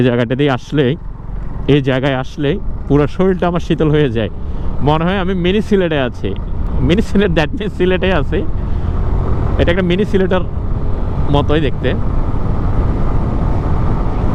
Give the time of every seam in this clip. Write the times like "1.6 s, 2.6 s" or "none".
none